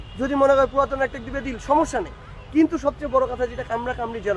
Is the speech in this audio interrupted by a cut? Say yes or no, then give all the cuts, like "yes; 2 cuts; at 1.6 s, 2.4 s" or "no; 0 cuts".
no; 0 cuts